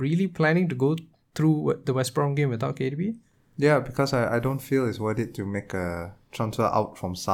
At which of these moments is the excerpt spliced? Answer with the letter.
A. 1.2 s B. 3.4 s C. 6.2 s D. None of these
D